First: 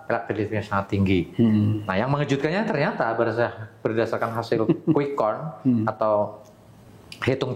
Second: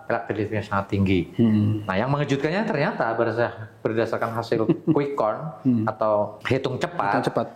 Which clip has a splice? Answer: second; 1 cut; at 6.4 s

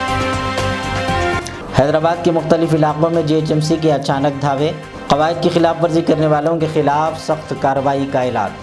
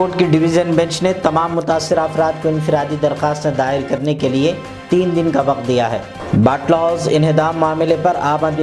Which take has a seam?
first; 1 cut; at 1.5 s

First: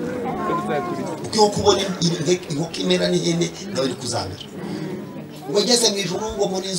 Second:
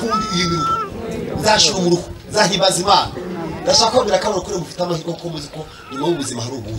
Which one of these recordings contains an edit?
first; 1 cut; at 5.3 s

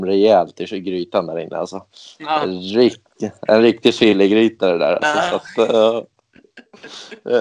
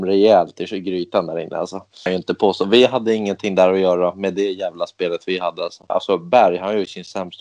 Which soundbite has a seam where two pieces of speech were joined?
second; 2 cuts; at 2.1 s, 5.9 s

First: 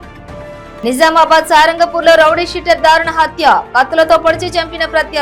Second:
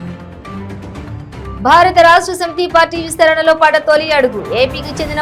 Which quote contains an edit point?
second; 1 cut; at 1.3 s

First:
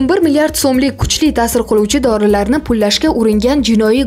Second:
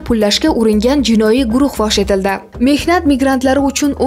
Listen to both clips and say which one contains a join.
second; 1 cut; at 2.5 s

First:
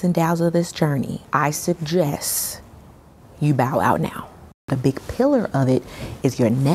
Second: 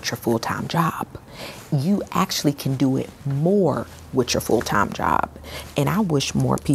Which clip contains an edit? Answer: first; 2 cuts; at 1.2 s, 4.7 s

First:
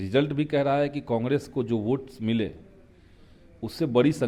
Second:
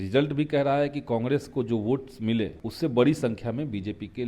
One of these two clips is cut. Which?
second; 1 cut; at 2.6 s

